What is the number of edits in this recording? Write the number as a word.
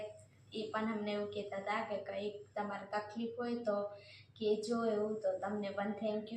zero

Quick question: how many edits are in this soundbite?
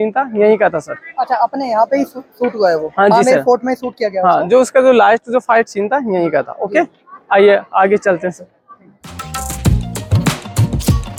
zero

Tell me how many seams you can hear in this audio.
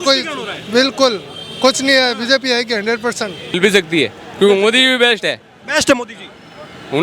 one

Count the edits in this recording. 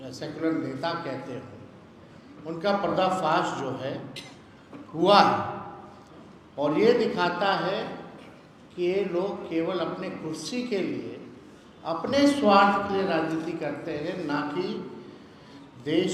zero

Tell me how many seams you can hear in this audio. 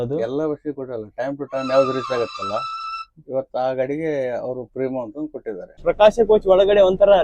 one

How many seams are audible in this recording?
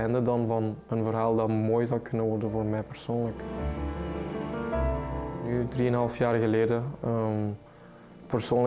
zero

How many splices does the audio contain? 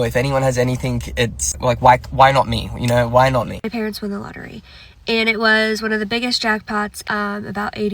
two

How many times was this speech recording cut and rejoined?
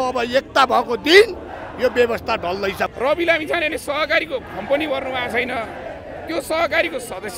one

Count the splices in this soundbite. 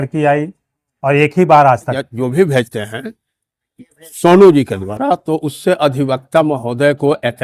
one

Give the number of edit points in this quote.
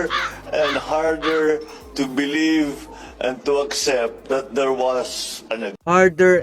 zero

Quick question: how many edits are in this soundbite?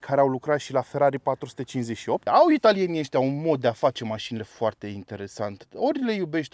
one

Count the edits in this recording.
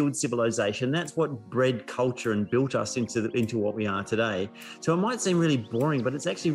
zero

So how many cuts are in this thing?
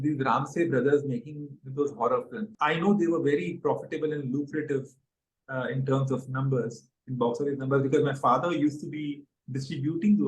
one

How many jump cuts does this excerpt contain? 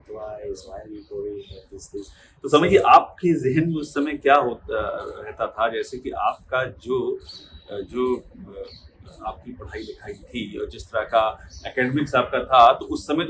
zero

